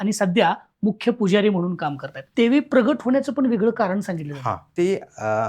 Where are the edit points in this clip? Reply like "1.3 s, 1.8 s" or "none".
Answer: 2.2 s